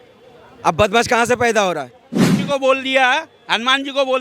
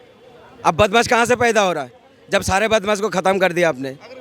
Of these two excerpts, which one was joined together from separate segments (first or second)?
first